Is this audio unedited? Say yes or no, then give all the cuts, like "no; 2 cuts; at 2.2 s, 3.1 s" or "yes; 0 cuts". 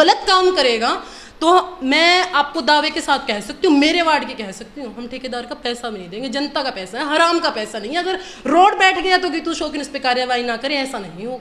yes; 0 cuts